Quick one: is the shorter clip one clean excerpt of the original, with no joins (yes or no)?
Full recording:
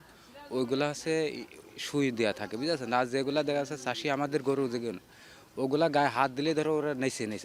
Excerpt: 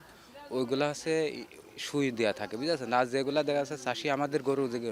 yes